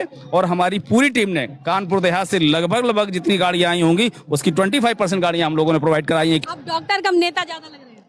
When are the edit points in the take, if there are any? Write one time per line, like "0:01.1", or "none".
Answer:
0:06.4